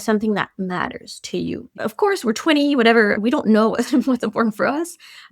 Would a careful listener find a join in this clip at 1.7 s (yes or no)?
yes